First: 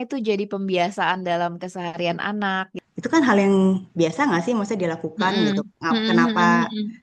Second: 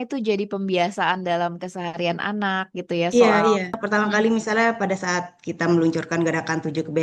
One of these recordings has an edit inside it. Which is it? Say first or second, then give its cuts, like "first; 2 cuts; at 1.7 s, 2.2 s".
first; 1 cut; at 2.7 s